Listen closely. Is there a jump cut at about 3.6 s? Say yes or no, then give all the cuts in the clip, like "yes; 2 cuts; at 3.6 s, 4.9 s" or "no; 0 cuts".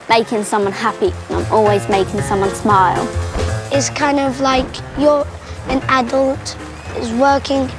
yes; 1 cut; at 3.6 s